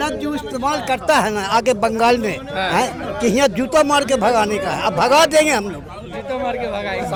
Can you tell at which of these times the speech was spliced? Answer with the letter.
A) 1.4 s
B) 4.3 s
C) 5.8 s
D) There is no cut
D